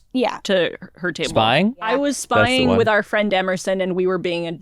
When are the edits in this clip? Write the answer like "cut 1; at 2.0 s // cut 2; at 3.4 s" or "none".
cut 1; at 1.8 s